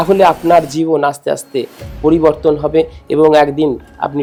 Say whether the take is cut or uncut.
uncut